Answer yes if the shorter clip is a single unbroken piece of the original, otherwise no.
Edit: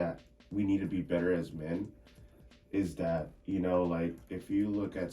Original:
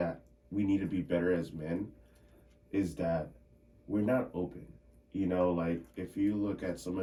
no